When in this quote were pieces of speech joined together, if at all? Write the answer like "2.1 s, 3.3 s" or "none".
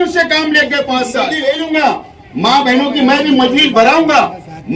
1.3 s